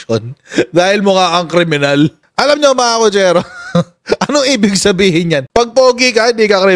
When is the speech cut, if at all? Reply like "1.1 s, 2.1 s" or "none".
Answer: 2.2 s